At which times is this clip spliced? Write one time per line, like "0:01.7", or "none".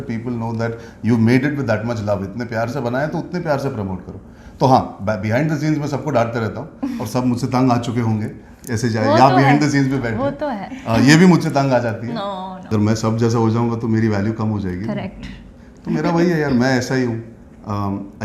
0:12.5